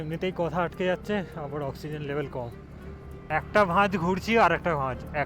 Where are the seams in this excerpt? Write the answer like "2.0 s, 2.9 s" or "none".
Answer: 3.2 s